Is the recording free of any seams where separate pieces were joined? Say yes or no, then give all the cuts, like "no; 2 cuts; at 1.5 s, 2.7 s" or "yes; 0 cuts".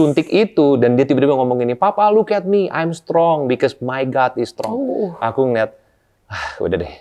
yes; 0 cuts